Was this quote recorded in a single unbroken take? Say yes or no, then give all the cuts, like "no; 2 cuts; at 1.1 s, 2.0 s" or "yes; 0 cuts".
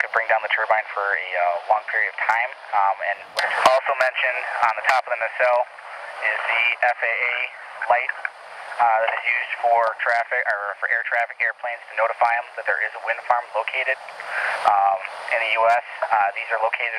yes; 0 cuts